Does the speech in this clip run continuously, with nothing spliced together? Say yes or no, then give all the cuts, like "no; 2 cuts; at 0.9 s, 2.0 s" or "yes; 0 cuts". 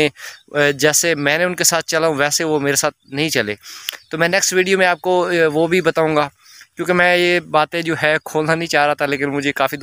yes; 0 cuts